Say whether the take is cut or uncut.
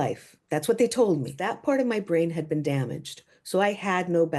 cut